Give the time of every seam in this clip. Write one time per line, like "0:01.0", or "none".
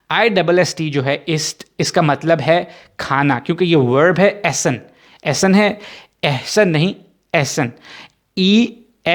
none